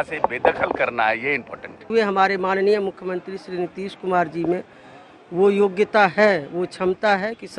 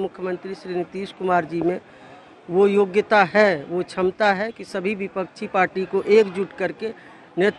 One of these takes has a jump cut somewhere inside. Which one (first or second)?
first